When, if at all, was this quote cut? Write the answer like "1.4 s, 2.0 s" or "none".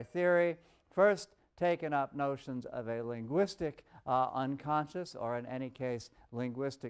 none